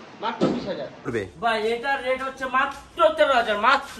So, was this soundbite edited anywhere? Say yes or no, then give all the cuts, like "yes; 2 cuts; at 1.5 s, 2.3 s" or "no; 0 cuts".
yes; 1 cut; at 1.1 s